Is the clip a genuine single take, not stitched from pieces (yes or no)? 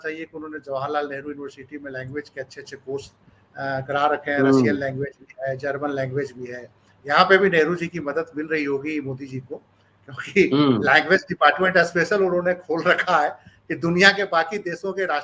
yes